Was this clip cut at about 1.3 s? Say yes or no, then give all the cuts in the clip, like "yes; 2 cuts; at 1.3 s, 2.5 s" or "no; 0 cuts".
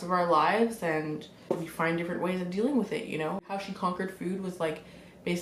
yes; 2 cuts; at 1.3 s, 3.5 s